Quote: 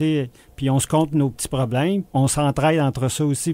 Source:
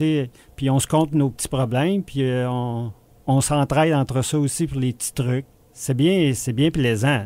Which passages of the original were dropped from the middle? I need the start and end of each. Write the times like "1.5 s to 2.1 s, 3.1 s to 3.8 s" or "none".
2.1 s to 3.2 s